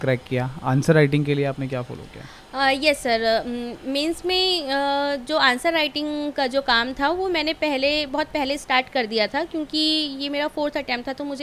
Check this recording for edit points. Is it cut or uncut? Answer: uncut